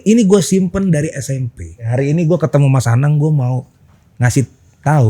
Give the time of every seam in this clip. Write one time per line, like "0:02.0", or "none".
0:01.9

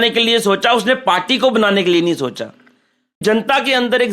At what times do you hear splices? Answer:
0:03.2

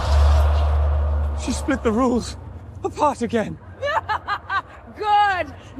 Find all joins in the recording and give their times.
none

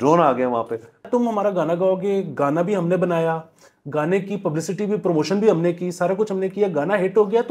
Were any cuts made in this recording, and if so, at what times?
0:01.1

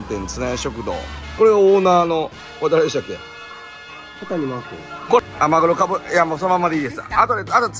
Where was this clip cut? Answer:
0:01.4
0:05.2

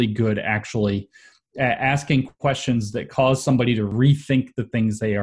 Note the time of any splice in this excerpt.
0:03.9

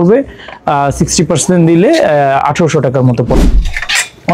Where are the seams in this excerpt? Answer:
0:03.4

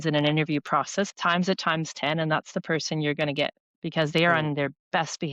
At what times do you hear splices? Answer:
0:01.1

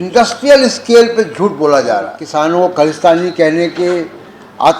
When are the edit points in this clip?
0:02.2

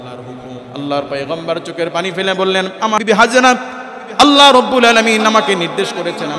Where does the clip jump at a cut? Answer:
0:03.0

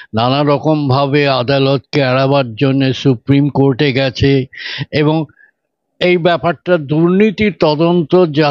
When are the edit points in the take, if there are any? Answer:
none

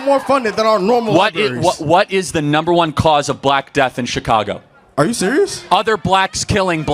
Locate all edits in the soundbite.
0:05.6

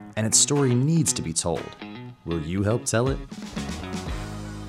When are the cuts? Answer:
none

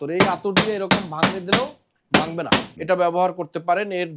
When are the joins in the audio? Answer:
0:02.7

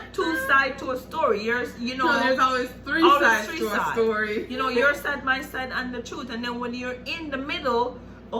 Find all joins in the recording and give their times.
none

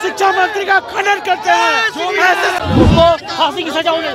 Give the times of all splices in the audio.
0:02.6

